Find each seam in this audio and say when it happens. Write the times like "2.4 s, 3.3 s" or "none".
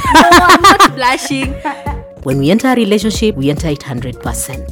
2.2 s